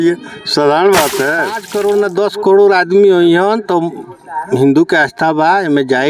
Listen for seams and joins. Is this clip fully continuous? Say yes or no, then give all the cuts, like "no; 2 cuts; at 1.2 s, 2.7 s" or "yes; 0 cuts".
no; 1 cut; at 1.6 s